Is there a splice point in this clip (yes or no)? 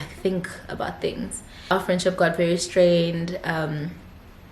yes